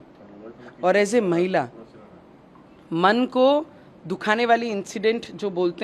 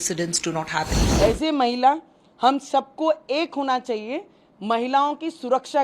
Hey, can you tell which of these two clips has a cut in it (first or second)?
second